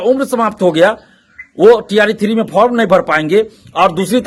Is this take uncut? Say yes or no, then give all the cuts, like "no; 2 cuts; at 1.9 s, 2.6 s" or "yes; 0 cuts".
yes; 0 cuts